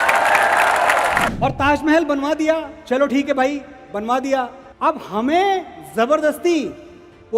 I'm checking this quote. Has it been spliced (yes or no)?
yes